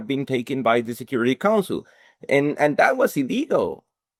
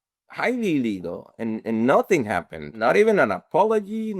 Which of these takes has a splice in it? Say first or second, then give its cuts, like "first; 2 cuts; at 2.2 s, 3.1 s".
second; 1 cut; at 2.7 s